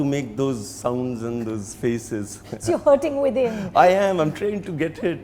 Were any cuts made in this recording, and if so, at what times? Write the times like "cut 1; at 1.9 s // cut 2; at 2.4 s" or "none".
none

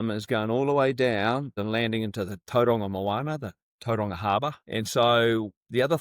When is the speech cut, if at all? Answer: cut 1; at 1.6 s // cut 2; at 4.6 s

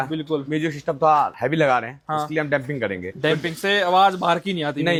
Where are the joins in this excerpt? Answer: none

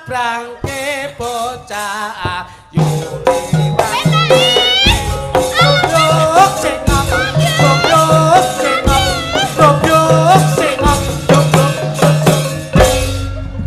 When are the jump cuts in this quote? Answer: none

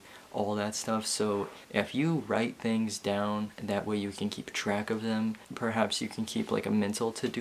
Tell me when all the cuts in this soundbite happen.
cut 1; at 5.4 s

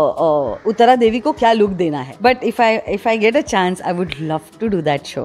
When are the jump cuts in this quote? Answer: cut 1; at 2.1 s

